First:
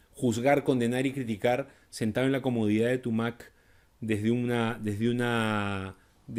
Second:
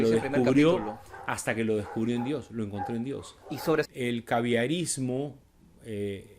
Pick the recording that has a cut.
second; 1 cut; at 3.9 s

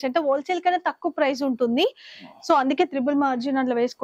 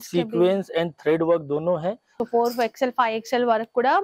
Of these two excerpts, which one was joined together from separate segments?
second; 1 cut; at 2.1 s

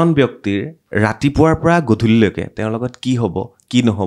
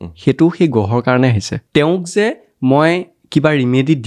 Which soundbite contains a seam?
second; 1 cut; at 1.5 s

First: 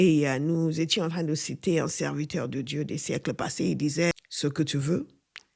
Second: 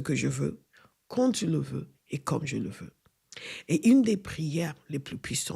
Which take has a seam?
first; 1 cut; at 4.1 s

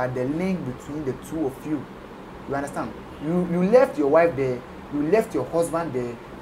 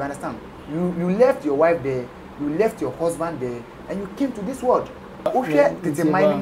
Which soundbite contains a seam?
second; 1 cut; at 5.3 s

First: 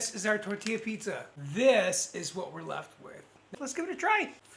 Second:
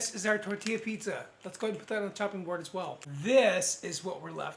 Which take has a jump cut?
first; 2 cuts; at 1.4 s, 3.5 s

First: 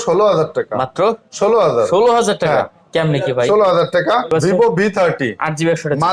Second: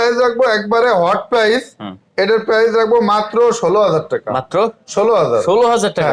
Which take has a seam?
first; 1 cut; at 4.3 s

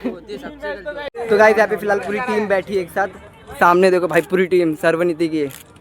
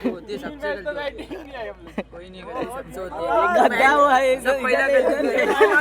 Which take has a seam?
first; 1 cut; at 1.1 s

